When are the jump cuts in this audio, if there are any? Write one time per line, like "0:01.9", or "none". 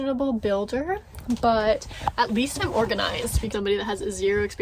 0:03.5